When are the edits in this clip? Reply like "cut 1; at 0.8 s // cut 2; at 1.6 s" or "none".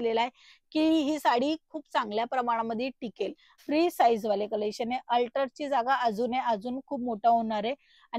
cut 1; at 3.5 s